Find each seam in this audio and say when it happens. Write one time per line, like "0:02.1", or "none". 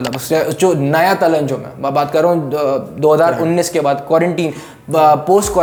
none